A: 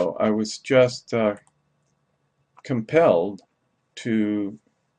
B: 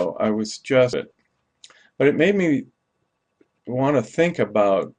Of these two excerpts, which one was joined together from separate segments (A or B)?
A